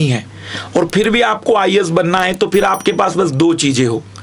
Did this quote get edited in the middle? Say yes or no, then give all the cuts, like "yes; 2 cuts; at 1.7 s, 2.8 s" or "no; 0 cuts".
no; 0 cuts